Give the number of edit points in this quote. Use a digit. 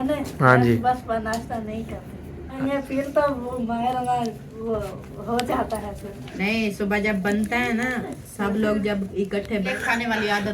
3